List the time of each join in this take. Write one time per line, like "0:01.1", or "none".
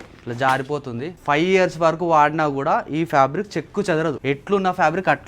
0:01.2
0:04.2